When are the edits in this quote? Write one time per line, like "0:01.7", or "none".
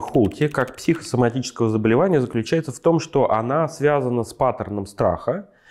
none